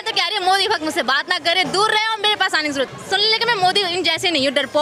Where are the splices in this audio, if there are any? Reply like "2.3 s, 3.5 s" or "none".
none